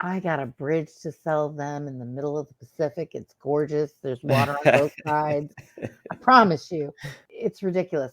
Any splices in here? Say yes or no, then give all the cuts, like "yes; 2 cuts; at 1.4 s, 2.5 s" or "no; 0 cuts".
yes; 1 cut; at 7.1 s